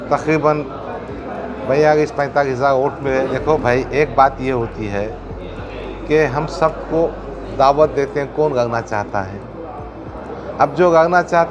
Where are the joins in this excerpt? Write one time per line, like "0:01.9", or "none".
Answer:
0:03.3